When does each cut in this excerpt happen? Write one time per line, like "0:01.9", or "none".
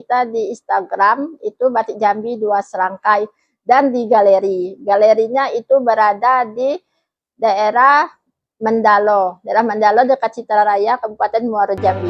none